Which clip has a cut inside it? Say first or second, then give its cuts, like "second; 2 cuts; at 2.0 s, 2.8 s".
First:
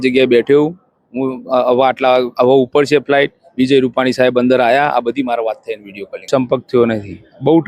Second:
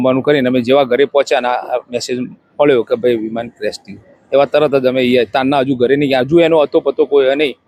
first; 1 cut; at 6.3 s